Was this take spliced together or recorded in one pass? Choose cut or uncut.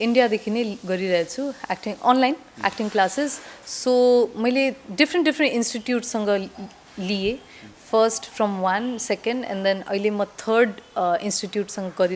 uncut